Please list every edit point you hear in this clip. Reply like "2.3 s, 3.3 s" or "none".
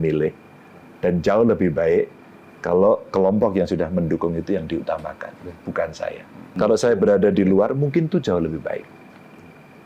6.5 s